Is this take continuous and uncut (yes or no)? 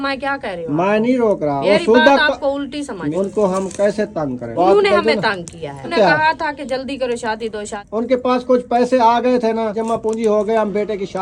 no